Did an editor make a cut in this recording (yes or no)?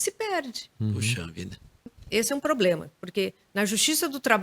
yes